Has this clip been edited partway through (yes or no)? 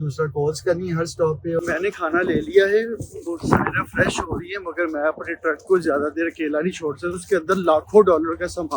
yes